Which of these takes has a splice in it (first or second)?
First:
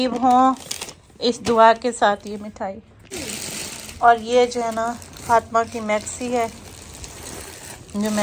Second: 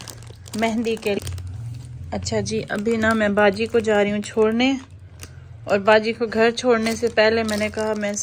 second